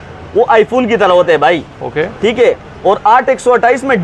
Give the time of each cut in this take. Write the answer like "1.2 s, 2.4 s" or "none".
none